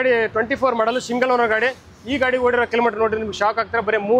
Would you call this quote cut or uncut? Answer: uncut